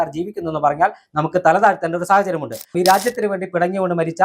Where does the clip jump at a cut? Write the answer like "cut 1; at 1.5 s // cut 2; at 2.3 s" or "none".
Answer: cut 1; at 2.7 s